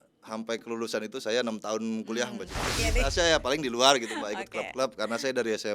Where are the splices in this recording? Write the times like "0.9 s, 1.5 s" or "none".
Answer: 2.8 s